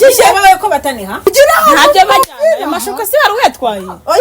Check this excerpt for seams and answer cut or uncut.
cut